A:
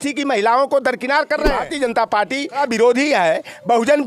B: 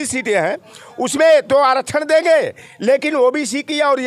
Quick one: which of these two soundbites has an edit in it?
A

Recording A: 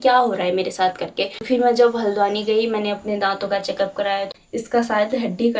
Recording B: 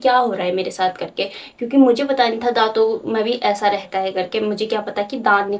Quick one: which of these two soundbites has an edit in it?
A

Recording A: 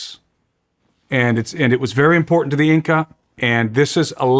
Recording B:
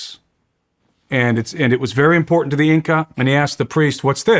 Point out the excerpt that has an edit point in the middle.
B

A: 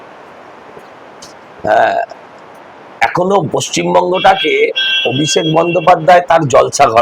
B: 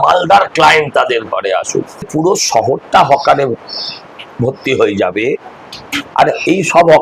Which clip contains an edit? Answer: B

